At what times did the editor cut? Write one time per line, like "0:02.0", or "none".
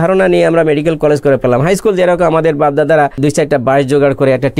0:03.2